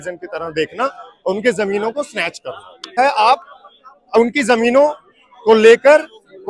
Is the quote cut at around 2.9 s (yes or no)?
yes